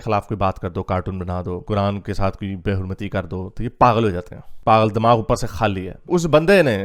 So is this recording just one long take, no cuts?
yes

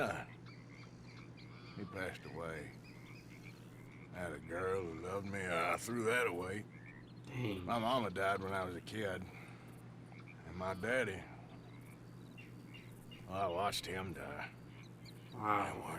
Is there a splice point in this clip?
no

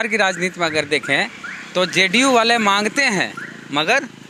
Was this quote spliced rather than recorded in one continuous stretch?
no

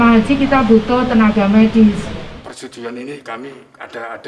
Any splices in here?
yes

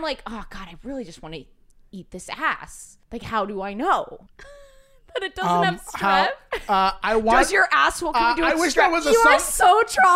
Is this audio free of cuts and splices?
yes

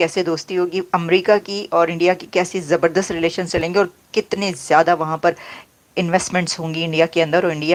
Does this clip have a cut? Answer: no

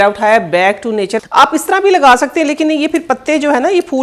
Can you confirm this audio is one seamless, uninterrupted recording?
no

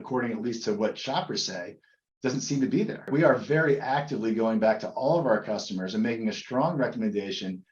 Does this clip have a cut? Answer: yes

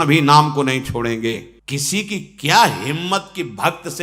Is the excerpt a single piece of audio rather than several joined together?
no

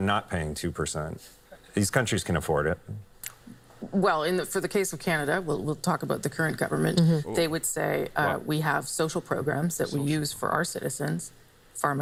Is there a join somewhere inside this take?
no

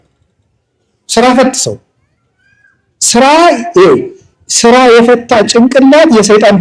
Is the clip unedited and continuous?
yes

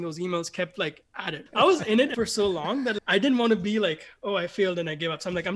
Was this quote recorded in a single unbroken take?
no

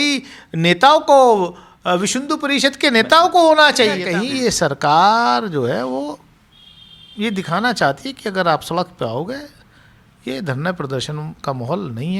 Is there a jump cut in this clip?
yes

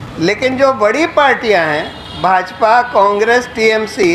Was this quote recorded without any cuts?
yes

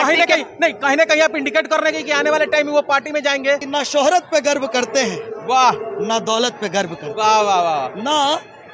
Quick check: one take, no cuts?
no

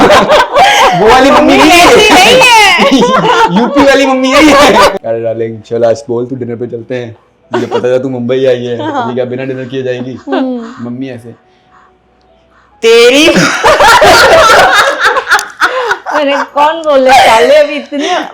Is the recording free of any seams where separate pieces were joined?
no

